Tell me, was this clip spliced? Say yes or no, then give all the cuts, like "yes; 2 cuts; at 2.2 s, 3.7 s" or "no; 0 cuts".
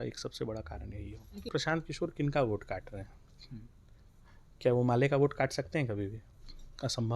yes; 1 cut; at 1.5 s